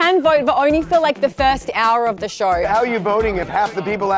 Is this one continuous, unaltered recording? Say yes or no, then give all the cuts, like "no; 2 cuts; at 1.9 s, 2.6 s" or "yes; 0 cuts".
no; 1 cut; at 2.7 s